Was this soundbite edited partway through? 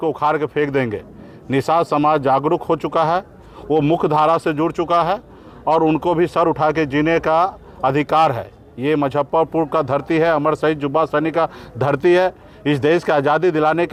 no; 0 cuts

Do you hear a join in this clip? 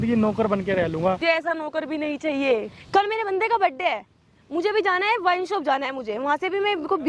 yes; 2 cuts; at 1.2 s, 2.7 s

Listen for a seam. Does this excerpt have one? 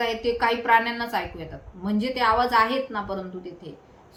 no; 0 cuts

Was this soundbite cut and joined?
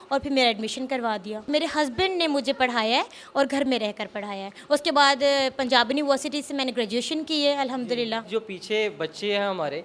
yes; 2 cuts; at 1.5 s, 8.2 s

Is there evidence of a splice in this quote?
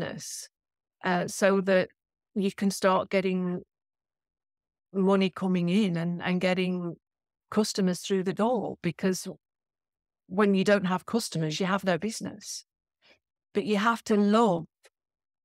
no; 0 cuts

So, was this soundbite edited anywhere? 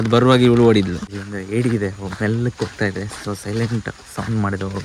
yes; 1 cut; at 1.0 s

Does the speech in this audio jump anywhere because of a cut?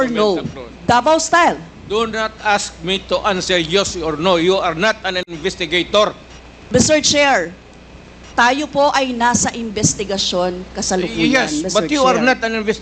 no; 0 cuts

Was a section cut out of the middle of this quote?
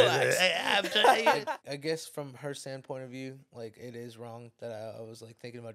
yes; 1 cut; at 1.4 s

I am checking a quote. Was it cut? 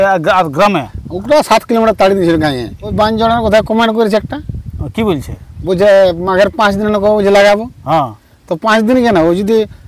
yes; 1 cut; at 2.8 s

